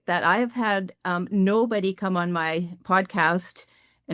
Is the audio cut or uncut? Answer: uncut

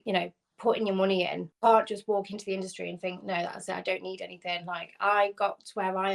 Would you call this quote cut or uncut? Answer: cut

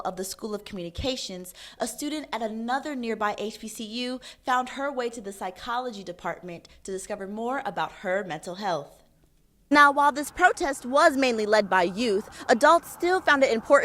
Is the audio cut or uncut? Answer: cut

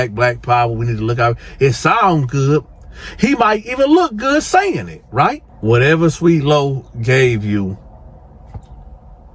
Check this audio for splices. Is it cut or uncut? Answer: cut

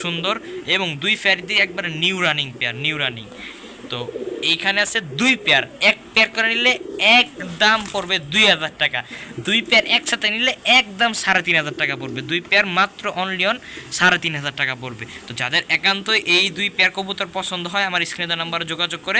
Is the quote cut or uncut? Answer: uncut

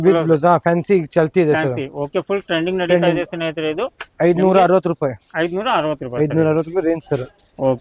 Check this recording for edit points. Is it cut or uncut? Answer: uncut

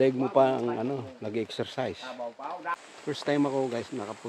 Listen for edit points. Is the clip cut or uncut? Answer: cut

